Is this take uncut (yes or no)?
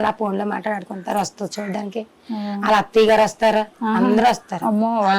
yes